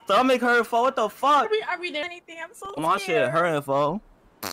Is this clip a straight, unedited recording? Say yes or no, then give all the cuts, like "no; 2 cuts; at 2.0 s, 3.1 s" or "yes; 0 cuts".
no; 1 cut; at 2.1 s